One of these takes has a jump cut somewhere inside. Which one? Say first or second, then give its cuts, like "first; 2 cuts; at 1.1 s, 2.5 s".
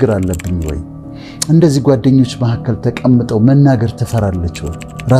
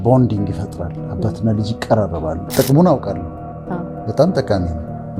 second; 1 cut; at 2.4 s